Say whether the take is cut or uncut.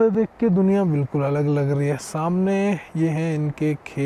uncut